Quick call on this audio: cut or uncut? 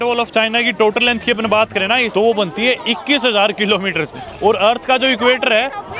cut